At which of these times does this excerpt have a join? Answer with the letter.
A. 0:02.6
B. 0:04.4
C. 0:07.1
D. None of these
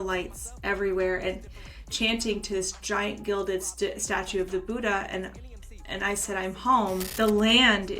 C